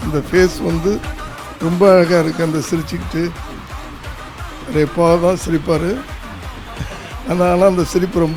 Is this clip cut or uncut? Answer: uncut